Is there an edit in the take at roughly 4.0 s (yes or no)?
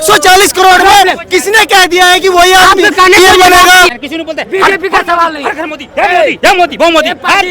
yes